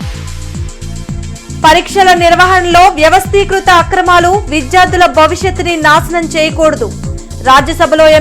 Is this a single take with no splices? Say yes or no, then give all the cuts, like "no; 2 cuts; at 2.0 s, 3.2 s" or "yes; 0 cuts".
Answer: no; 1 cut; at 1.6 s